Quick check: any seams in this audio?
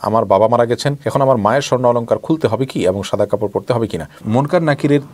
yes; 2 cuts; at 0.9 s, 4.2 s

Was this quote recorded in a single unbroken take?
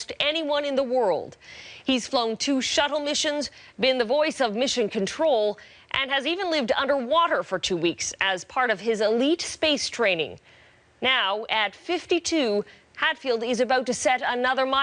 yes; 0 cuts

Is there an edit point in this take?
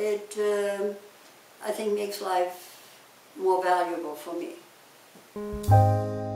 yes; 1 cut; at 5.4 s

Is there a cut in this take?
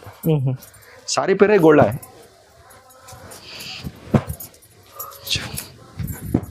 no; 0 cuts

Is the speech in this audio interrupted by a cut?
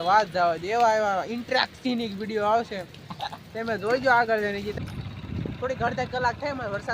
yes; 1 cut; at 4.7 s

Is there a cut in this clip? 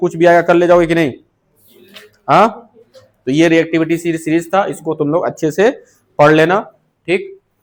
no; 0 cuts

